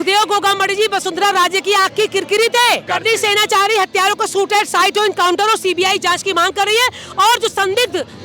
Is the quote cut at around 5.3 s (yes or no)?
no